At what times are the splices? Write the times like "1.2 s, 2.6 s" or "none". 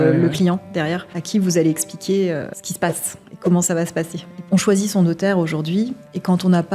1.1 s, 2.6 s, 4.4 s